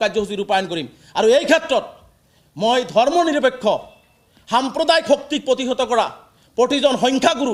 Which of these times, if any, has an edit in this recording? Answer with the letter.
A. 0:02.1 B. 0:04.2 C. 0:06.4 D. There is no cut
D